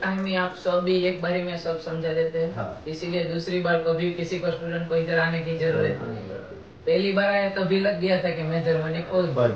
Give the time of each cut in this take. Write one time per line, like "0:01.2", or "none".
none